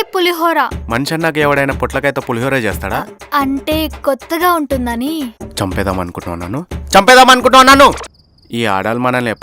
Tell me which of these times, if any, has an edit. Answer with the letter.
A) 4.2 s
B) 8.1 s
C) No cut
B